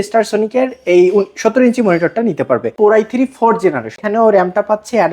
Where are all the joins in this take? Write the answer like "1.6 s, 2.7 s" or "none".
2.7 s, 4.0 s